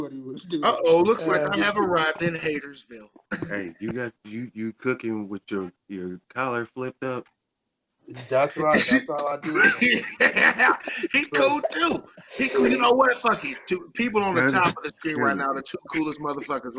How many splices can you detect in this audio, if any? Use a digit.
1